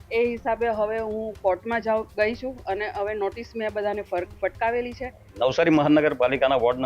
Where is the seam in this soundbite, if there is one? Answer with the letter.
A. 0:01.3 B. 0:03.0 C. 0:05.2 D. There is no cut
C